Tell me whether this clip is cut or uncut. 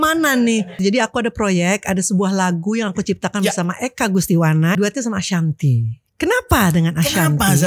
cut